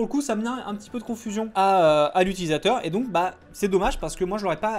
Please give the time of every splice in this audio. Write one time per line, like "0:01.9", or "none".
none